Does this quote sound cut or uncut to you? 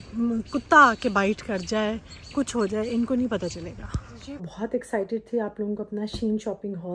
cut